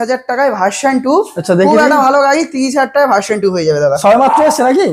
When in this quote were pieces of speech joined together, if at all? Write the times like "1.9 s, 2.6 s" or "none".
none